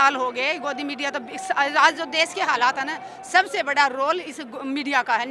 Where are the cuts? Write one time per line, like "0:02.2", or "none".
none